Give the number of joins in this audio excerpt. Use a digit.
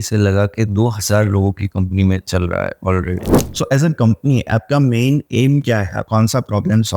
2